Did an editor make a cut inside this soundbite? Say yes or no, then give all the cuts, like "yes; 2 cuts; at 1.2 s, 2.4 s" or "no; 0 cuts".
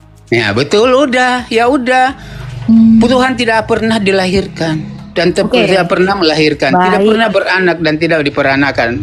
no; 0 cuts